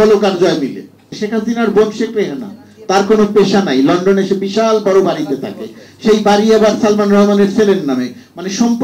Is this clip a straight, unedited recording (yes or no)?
no